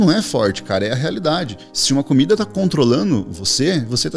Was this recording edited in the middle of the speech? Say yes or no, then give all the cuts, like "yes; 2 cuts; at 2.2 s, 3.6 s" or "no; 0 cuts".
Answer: no; 0 cuts